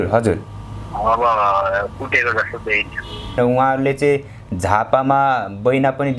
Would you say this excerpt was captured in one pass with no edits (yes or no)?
no